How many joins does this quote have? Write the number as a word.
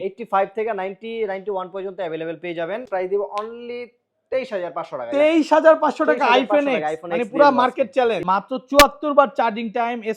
two